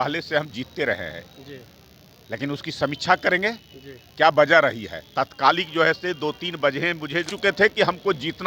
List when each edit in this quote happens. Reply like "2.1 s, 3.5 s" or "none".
7.3 s